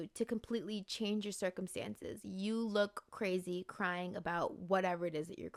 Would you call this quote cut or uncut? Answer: uncut